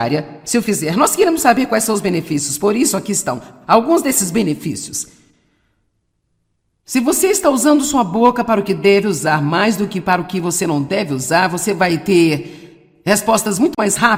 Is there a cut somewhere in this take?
no; 0 cuts

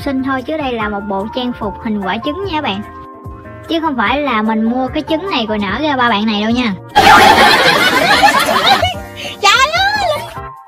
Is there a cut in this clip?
no; 0 cuts

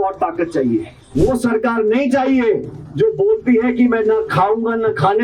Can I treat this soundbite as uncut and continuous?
no; 1 cut; at 1.0 s

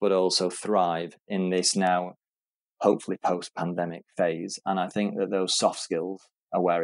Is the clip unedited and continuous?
yes; 0 cuts

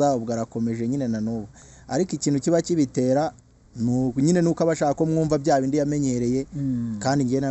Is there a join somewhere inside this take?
no; 0 cuts

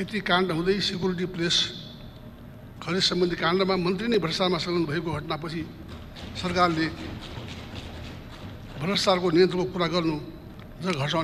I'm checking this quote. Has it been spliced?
no; 0 cuts

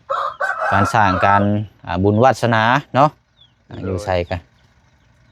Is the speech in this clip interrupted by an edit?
no; 0 cuts

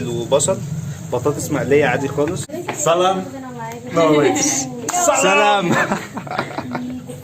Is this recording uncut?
no; 1 cut; at 2.5 s

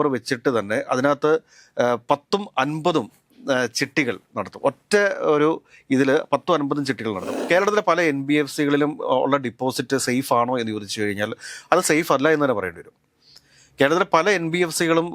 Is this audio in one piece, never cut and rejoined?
no; 1 cut; at 7.3 s

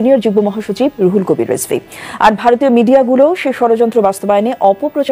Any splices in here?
no; 0 cuts

